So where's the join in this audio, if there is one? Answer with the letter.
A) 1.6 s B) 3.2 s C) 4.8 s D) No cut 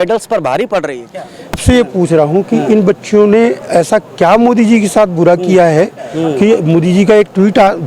A